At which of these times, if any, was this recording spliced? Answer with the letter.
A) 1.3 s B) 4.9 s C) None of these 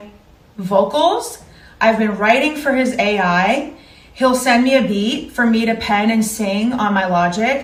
C